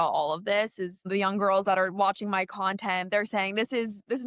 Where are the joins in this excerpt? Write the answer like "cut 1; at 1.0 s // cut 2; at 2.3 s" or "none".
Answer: cut 1; at 1.1 s